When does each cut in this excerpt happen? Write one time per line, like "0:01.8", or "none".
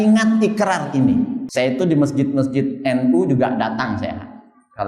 0:01.4